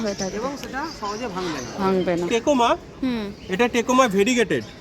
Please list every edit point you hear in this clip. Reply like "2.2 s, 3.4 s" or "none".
2.3 s